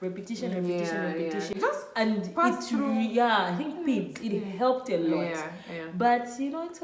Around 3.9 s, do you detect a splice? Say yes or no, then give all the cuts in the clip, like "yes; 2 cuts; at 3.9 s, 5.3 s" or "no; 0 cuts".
no; 1 cut; at 1.5 s